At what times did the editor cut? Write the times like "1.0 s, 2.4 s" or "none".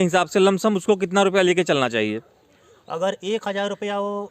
none